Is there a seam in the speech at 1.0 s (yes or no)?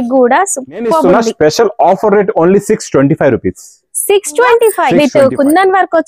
yes